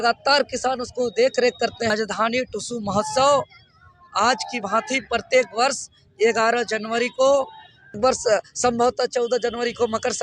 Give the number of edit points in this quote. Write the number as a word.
two